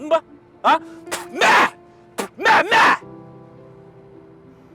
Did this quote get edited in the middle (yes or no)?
yes